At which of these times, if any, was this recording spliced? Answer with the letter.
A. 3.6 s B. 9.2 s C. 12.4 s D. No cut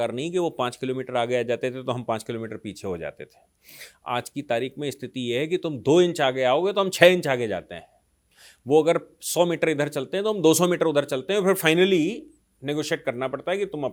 D